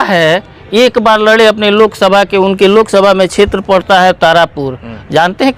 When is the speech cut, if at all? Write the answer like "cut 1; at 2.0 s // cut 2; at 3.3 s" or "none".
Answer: none